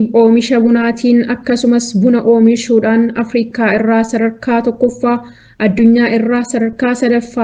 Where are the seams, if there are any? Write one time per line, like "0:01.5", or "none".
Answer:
none